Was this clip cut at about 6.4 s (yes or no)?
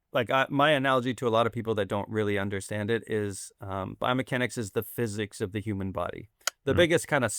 yes